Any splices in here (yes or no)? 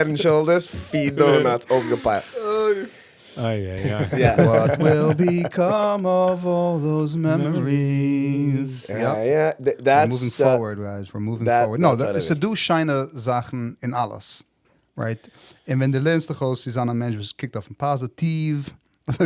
yes